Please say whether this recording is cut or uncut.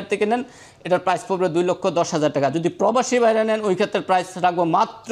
uncut